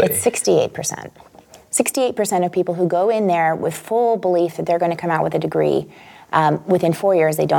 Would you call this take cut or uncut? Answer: uncut